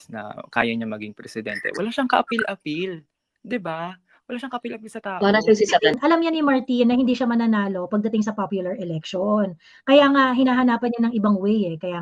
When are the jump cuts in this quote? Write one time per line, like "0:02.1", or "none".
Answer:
0:05.9